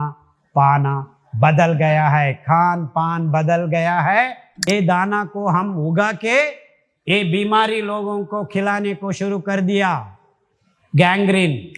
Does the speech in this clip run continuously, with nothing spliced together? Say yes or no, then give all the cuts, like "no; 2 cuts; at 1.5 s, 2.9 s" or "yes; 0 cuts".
no; 1 cut; at 4.5 s